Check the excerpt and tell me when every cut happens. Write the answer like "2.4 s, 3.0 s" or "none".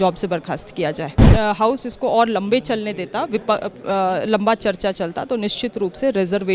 1.3 s